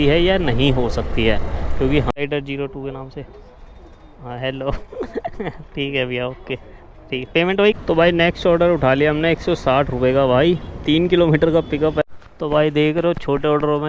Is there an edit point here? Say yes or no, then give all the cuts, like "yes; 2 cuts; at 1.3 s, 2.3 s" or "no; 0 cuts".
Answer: yes; 3 cuts; at 2.1 s, 7.7 s, 12.0 s